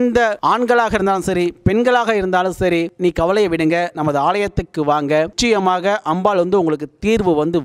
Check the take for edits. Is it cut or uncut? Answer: cut